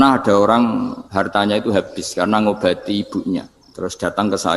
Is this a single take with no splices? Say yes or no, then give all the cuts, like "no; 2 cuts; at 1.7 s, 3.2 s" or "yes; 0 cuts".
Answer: no; 2 cuts; at 1.0 s, 3.6 s